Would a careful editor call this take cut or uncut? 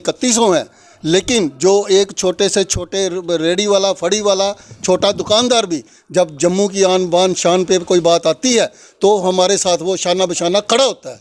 uncut